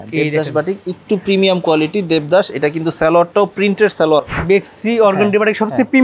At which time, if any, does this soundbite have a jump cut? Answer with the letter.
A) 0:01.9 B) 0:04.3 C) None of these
B